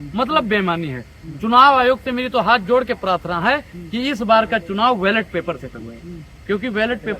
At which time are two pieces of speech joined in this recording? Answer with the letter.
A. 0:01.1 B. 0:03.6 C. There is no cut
C